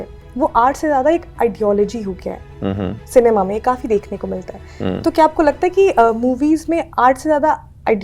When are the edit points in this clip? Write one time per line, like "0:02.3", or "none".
none